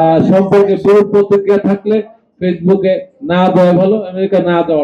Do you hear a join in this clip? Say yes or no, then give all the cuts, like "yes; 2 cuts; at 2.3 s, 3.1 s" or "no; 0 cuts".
no; 0 cuts